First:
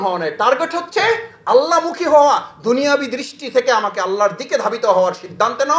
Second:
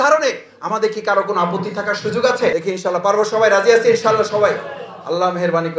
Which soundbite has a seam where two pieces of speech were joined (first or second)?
second